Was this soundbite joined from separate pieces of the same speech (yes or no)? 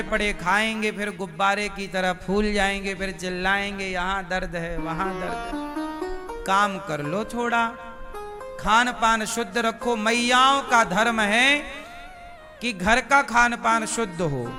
no